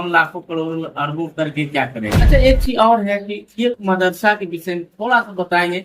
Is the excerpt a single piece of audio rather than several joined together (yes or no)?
no